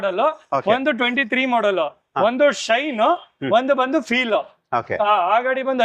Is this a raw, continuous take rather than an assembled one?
yes; 0 cuts

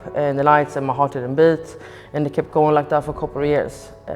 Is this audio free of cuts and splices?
yes; 0 cuts

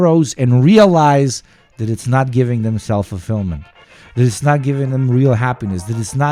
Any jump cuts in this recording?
no; 0 cuts

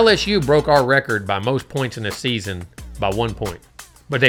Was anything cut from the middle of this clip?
no; 0 cuts

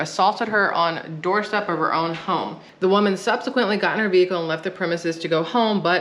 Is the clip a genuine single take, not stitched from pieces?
no; 1 cut; at 2.6 s

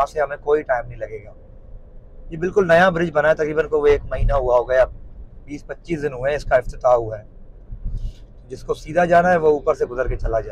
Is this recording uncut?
yes; 0 cuts

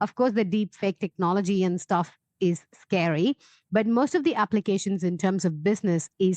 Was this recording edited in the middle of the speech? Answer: no; 0 cuts

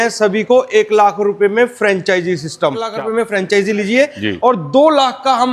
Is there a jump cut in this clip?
yes; 1 cut; at 2.9 s

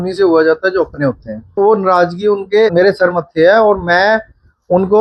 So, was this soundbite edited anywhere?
yes; 2 cuts; at 1.6 s, 2.7 s

